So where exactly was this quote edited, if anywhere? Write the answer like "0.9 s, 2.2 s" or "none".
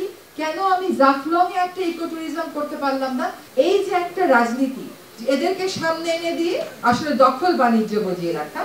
3.4 s